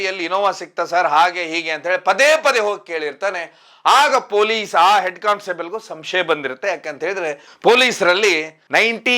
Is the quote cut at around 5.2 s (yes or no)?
no